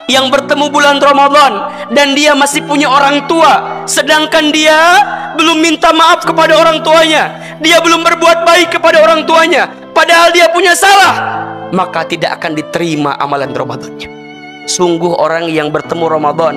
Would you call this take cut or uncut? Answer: cut